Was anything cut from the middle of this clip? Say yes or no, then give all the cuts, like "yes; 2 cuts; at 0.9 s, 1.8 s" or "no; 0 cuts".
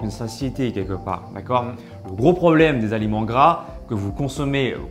no; 0 cuts